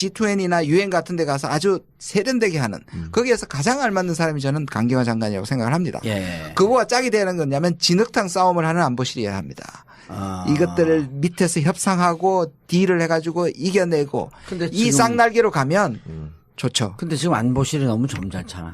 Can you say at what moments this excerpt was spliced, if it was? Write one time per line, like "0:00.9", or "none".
0:06.0